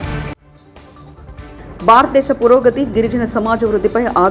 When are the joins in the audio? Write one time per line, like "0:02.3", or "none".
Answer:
none